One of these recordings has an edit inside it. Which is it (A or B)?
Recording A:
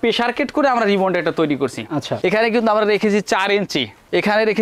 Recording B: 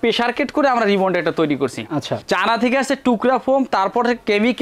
A